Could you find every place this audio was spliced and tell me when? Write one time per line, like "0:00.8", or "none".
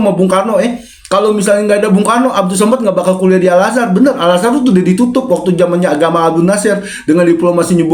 none